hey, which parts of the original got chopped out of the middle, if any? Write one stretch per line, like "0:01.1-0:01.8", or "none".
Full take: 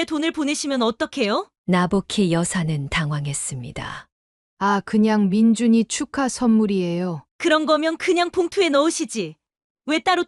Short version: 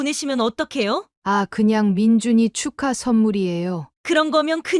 0:01.5-0:04.5